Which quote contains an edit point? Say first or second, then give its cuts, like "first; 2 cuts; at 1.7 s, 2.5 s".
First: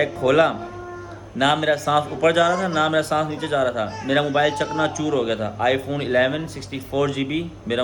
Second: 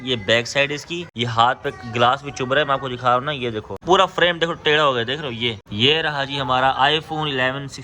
second; 3 cuts; at 1.0 s, 3.8 s, 5.6 s